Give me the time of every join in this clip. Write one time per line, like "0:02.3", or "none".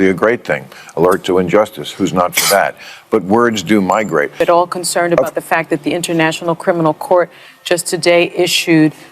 0:04.4